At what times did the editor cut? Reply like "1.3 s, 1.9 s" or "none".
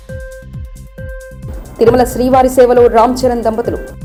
none